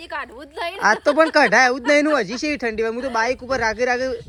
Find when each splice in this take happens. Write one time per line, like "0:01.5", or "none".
none

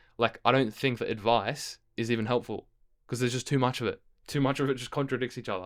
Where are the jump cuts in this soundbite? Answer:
none

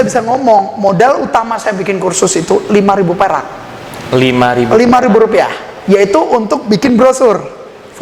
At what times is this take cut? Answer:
none

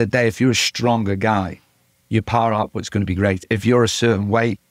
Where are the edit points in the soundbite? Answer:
0:03.5

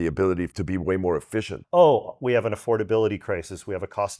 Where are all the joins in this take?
0:01.6

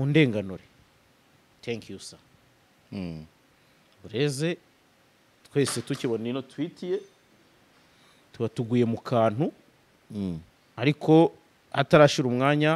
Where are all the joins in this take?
none

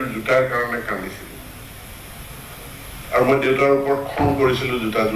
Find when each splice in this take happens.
none

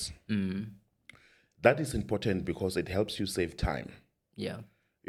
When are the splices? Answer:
none

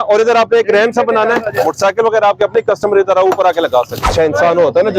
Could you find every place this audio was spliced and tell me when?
0:04.1

